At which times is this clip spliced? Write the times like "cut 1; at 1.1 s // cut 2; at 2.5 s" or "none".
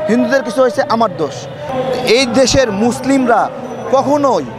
cut 1; at 1.7 s